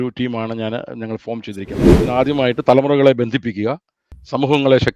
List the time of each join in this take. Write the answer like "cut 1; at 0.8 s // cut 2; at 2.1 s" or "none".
cut 1; at 1.9 s

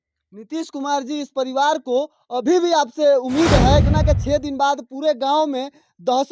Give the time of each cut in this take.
cut 1; at 3.9 s

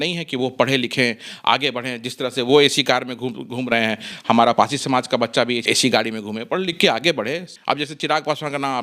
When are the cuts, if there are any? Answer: cut 1; at 5.6 s // cut 2; at 7.5 s

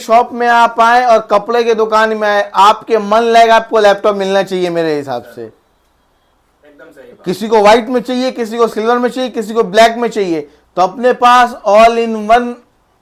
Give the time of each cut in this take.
none

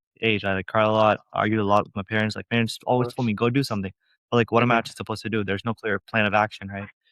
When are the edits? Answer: none

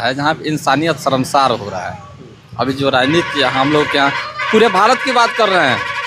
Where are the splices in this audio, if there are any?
none

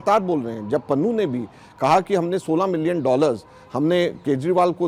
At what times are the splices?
none

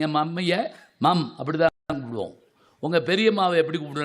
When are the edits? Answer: none

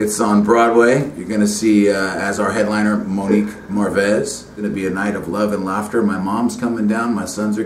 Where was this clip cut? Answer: cut 1; at 4.5 s

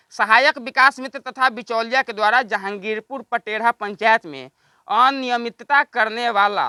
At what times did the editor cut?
none

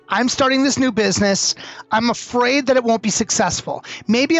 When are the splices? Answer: cut 1; at 1.8 s

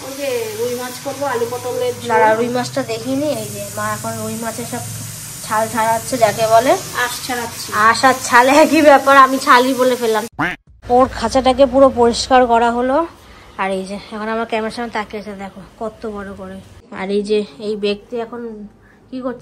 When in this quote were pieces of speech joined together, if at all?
cut 1; at 10.2 s // cut 2; at 16.9 s

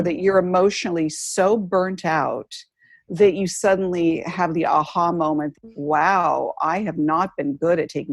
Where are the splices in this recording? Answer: cut 1; at 5.6 s

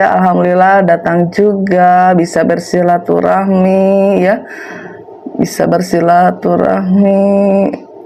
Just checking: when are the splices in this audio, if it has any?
none

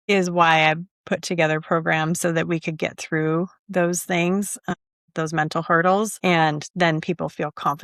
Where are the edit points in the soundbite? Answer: none

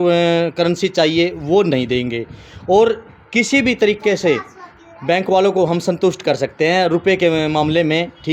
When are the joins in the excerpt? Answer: none

